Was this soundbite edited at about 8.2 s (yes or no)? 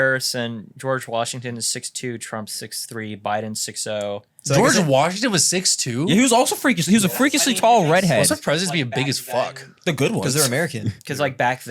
yes